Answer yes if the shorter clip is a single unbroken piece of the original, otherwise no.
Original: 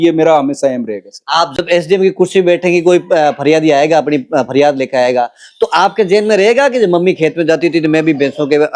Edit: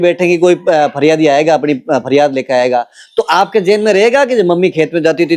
yes